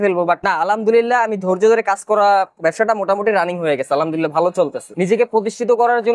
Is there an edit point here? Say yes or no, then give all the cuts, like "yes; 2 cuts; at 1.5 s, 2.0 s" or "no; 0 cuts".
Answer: yes; 2 cuts; at 2.5 s, 4.9 s